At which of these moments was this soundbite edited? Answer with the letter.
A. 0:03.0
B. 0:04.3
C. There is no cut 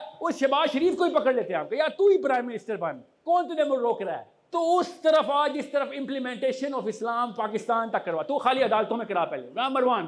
B